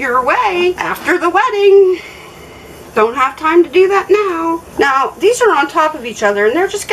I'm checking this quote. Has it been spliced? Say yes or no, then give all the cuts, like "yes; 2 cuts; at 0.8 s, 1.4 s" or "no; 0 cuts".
no; 0 cuts